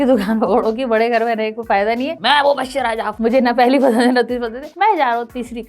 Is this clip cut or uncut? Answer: cut